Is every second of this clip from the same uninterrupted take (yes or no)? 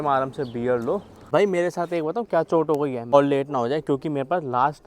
no